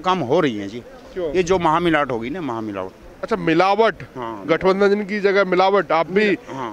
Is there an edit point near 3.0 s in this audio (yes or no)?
no